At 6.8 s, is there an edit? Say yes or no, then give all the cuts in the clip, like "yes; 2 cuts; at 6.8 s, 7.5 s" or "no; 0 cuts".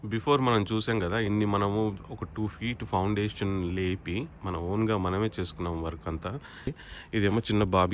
yes; 2 cuts; at 1.3 s, 6.8 s